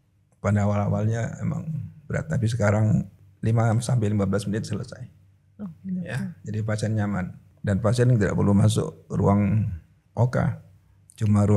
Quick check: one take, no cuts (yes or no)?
no